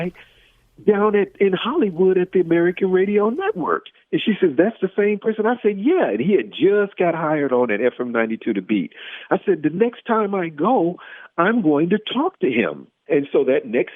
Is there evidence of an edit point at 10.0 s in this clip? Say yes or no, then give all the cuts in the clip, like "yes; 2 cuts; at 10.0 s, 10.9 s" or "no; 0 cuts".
no; 1 cut; at 12.9 s